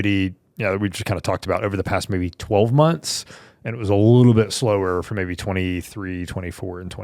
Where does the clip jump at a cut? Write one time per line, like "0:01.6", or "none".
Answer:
none